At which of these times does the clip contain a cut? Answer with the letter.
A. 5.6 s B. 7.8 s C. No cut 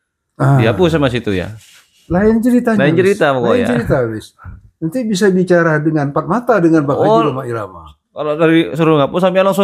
C